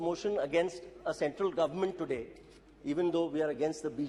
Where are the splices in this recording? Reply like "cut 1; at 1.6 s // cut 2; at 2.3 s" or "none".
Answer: none